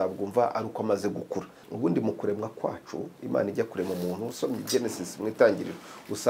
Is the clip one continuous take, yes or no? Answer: no